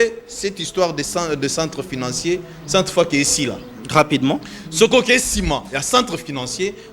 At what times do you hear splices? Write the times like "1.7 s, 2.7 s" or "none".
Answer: none